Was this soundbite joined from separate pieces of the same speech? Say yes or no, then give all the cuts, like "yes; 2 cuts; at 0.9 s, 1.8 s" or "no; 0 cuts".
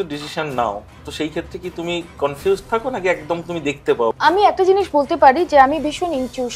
yes; 1 cut; at 4.1 s